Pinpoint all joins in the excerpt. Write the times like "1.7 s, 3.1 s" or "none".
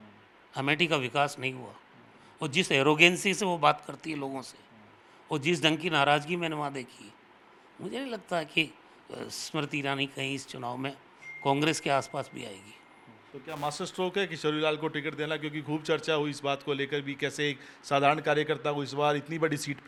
none